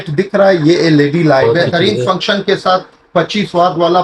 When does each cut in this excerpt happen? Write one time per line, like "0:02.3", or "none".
0:01.4